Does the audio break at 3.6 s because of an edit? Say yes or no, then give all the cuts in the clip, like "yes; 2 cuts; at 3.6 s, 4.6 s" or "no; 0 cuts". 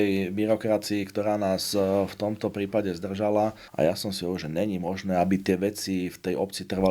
yes; 1 cut; at 3.6 s